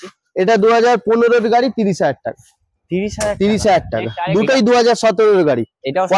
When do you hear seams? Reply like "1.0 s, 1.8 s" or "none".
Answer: 4.1 s